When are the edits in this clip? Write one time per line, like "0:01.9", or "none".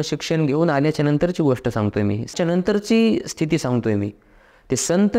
0:02.3

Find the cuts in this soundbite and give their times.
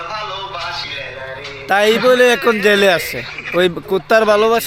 none

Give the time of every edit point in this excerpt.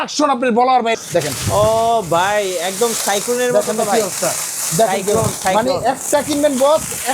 0:00.9

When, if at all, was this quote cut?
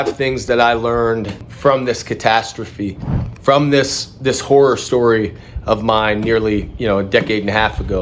none

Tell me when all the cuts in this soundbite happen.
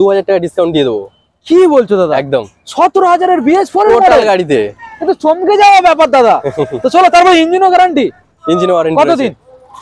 none

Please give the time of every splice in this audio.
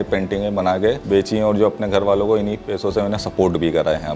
0:01.0

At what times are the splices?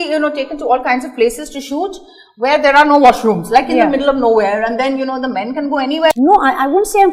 0:06.1

